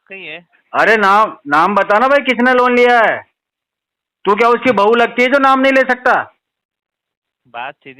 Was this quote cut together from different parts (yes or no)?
no